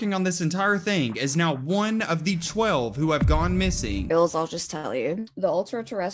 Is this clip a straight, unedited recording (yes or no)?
no